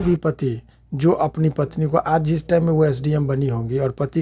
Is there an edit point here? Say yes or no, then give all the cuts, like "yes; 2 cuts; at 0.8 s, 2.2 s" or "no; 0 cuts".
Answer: no; 0 cuts